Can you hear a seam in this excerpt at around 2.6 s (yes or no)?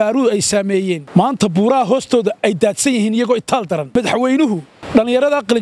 no